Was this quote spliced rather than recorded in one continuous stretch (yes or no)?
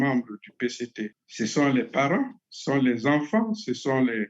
yes